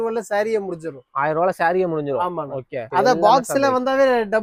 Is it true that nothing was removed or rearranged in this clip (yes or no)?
yes